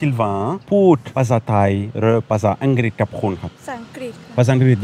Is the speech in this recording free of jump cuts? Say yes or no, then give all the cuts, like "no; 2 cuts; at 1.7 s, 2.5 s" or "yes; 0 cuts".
yes; 0 cuts